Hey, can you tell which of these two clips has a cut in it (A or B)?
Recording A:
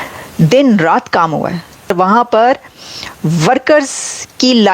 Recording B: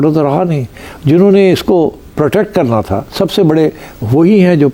A